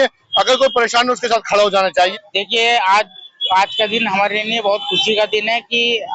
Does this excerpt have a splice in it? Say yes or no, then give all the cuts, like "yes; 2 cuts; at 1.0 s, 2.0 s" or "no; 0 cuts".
yes; 1 cut; at 1.9 s